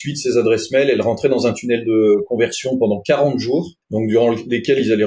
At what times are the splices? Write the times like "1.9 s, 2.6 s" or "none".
3.8 s